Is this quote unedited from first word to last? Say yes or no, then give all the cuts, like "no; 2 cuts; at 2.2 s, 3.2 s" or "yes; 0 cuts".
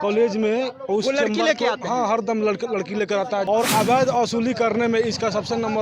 no; 1 cut; at 3.4 s